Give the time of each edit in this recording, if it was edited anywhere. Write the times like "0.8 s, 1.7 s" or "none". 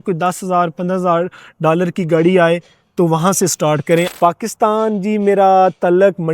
4.1 s